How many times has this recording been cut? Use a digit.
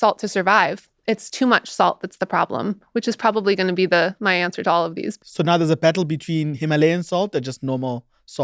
1